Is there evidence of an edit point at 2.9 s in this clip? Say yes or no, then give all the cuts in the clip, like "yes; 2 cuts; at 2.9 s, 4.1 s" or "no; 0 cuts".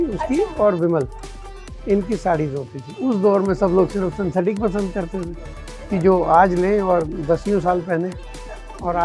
yes; 1 cut; at 2.9 s